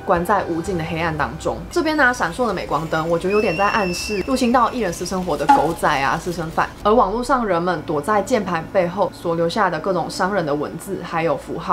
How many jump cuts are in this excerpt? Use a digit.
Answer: 2